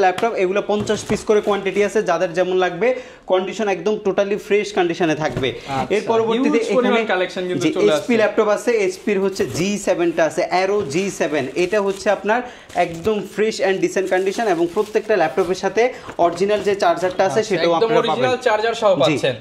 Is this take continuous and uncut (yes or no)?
yes